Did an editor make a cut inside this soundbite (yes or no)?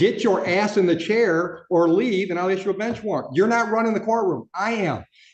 no